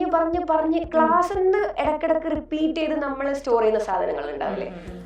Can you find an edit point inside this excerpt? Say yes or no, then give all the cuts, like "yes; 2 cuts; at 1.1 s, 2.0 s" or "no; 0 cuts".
no; 0 cuts